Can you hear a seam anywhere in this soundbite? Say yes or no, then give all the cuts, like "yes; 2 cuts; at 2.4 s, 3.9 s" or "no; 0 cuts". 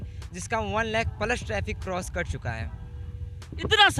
no; 0 cuts